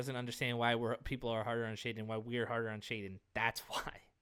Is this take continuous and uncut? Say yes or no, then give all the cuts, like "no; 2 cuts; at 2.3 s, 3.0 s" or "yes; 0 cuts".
yes; 0 cuts